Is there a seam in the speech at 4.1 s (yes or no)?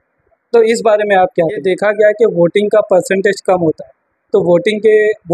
no